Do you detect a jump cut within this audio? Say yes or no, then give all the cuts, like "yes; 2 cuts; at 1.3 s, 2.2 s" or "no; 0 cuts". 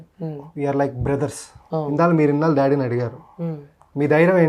yes; 1 cut; at 1.9 s